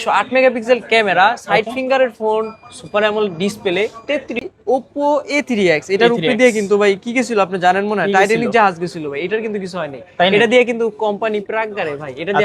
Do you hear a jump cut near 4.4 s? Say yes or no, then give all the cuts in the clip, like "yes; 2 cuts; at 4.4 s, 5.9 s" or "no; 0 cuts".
yes; 1 cut; at 4.4 s